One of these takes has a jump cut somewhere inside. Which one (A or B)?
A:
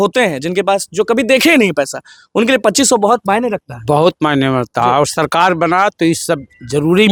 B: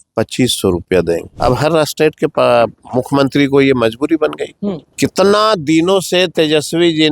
B